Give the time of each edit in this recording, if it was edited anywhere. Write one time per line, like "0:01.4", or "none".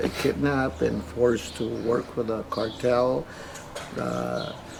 none